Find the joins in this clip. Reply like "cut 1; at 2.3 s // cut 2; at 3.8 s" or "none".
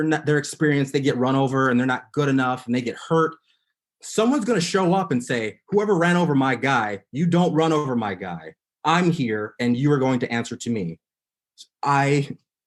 none